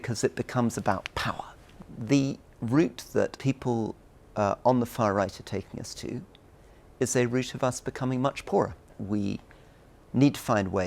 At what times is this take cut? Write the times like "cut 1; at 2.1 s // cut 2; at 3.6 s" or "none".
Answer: cut 1; at 1.8 s // cut 2; at 3.3 s // cut 3; at 8.9 s